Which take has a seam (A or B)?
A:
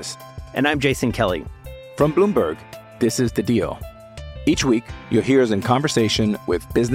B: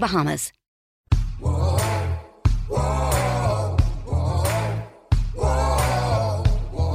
B